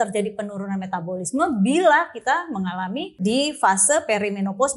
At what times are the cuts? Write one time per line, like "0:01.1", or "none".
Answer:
0:03.0